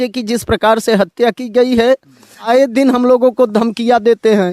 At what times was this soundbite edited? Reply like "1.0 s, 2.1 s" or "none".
2.5 s